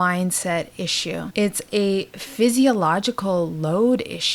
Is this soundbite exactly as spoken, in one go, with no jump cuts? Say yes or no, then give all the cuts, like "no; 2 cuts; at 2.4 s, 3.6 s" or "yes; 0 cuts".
no; 1 cut; at 1.3 s